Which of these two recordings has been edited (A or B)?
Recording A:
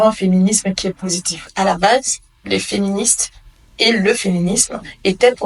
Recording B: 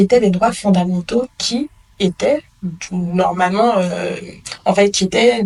A